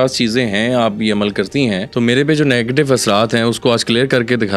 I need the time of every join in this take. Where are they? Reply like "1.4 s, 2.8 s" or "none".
1.9 s